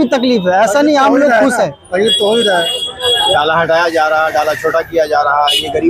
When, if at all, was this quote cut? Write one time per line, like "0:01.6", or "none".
0:03.3